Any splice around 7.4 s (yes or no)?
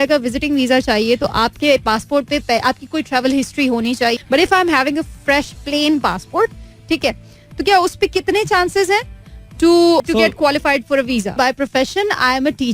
no